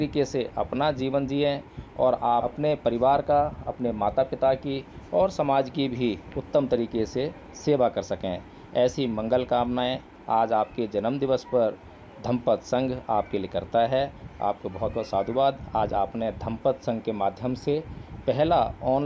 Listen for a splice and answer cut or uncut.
cut